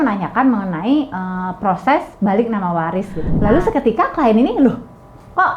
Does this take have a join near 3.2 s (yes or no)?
yes